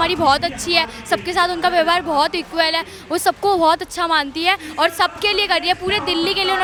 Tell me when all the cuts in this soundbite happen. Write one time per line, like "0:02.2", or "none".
none